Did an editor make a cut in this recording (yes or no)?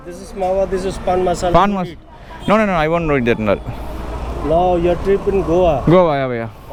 no